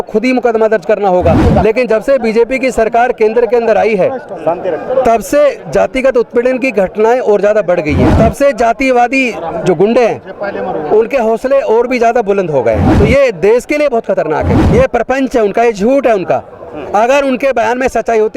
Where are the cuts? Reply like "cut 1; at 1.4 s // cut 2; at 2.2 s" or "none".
cut 1; at 1.4 s // cut 2; at 8.1 s // cut 3; at 12.9 s // cut 4; at 14.6 s